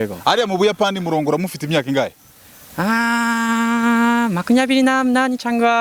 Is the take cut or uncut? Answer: uncut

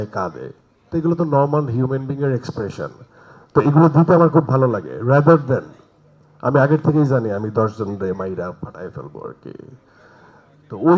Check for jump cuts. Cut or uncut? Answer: uncut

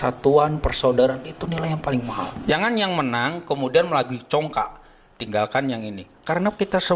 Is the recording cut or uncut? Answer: cut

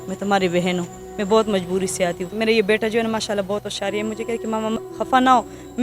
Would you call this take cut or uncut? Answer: cut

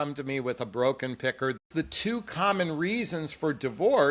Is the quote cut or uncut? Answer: cut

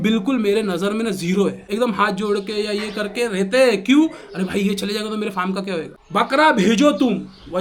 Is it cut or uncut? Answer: cut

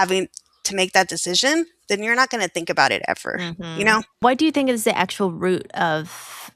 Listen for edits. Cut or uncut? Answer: cut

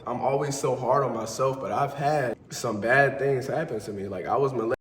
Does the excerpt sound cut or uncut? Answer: cut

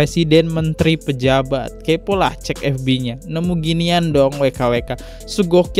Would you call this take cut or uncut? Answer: uncut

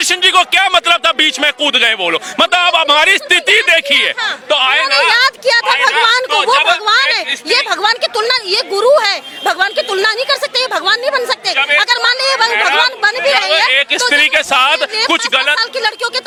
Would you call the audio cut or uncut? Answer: uncut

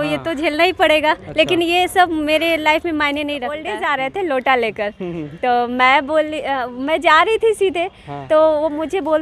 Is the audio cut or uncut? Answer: cut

